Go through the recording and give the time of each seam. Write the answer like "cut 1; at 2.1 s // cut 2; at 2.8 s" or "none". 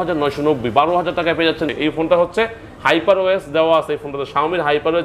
cut 1; at 1.7 s